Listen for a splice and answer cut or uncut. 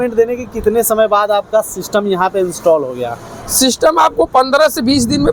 uncut